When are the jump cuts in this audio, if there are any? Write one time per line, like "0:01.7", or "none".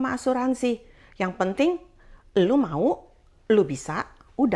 none